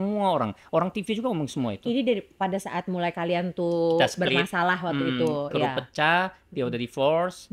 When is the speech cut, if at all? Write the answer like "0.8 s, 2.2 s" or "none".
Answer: none